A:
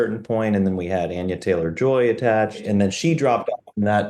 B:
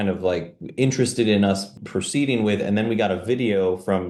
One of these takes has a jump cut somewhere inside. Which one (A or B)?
A